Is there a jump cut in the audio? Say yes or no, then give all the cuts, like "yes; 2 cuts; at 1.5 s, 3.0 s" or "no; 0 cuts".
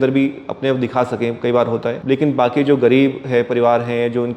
yes; 1 cut; at 1.9 s